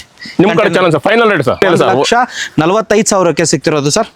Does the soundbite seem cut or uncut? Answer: cut